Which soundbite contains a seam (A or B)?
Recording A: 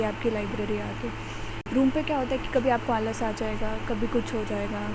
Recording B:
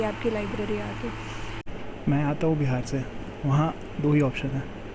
B